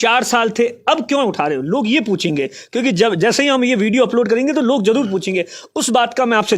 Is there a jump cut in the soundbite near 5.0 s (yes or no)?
no